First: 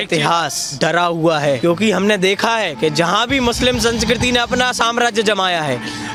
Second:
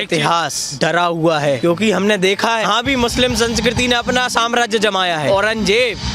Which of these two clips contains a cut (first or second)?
second